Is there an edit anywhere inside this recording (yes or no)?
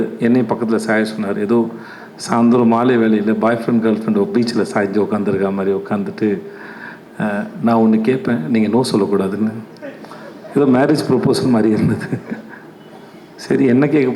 no